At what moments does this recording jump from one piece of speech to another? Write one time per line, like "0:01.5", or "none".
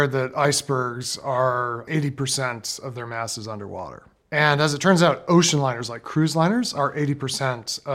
0:01.8
0:04.0